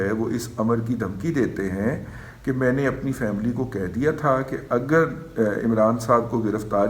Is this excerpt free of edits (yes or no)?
yes